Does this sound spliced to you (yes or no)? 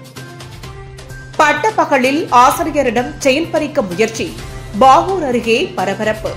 no